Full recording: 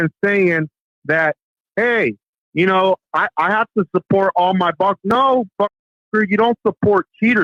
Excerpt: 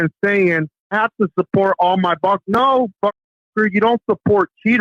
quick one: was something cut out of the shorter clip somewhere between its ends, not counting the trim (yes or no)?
yes